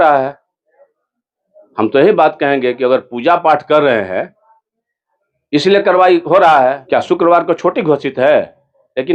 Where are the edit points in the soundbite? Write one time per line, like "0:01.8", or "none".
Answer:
0:06.8